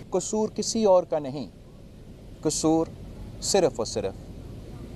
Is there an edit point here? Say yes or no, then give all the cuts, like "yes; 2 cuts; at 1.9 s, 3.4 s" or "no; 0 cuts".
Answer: no; 0 cuts